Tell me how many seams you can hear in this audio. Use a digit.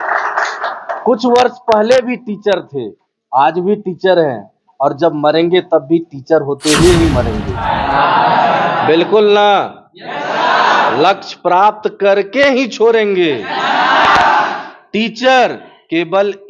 1